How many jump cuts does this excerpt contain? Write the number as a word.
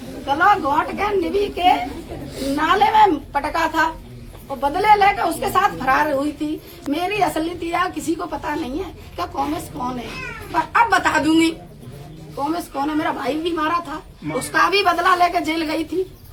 zero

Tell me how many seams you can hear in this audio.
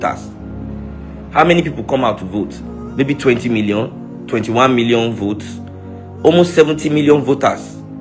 one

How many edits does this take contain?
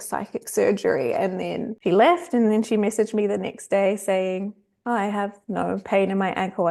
one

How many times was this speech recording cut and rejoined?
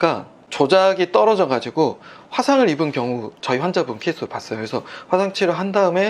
zero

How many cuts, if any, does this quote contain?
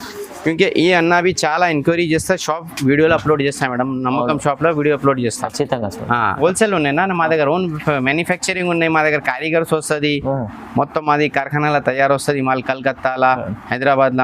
one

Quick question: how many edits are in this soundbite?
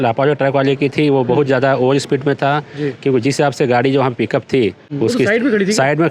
zero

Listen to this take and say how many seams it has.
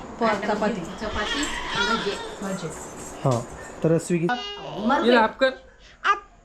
one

